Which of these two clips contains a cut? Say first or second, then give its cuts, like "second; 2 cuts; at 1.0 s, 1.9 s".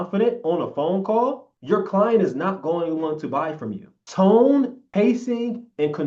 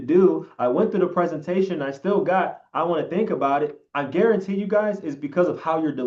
first; 1 cut; at 4.8 s